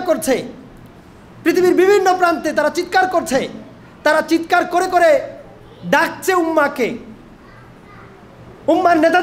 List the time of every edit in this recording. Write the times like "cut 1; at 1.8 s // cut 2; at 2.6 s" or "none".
none